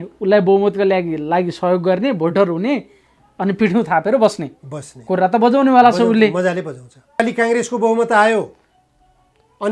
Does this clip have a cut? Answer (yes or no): yes